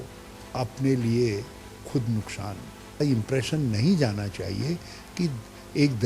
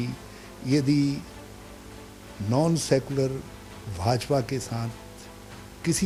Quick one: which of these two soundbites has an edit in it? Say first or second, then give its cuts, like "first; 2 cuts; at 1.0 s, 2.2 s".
first; 1 cut; at 3.0 s